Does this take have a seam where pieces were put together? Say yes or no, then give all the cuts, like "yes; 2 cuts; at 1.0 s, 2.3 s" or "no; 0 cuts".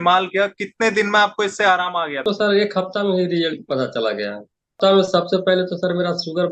yes; 2 cuts; at 2.2 s, 4.8 s